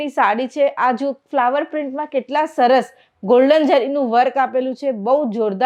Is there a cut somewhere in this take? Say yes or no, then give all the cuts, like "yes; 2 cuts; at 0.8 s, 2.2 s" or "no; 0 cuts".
no; 0 cuts